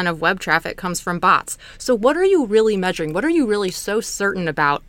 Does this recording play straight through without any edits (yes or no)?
yes